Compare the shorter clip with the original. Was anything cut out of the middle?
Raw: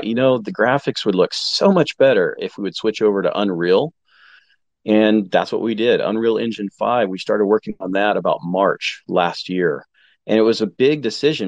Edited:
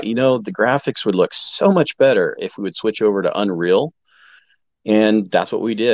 no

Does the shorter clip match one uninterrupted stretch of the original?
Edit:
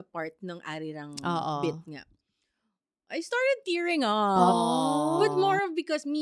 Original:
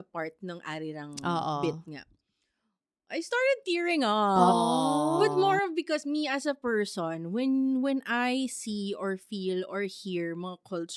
yes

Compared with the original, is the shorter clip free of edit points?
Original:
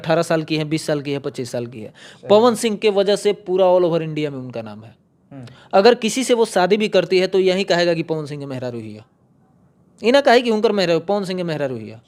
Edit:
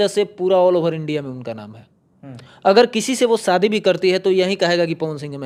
yes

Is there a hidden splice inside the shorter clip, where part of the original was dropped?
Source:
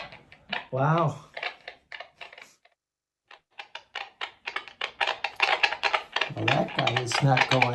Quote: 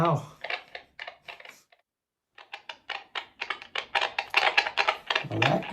yes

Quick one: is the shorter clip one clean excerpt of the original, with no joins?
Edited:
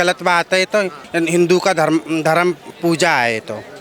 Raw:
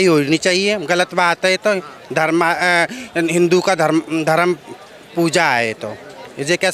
no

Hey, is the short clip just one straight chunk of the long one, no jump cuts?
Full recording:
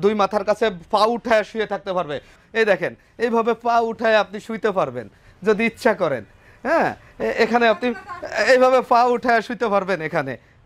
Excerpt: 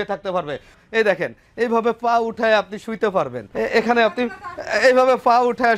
no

